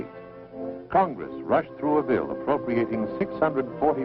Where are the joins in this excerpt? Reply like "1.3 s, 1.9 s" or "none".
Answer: 2.9 s